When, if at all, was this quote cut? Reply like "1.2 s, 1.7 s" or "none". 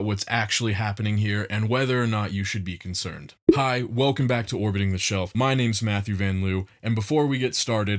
none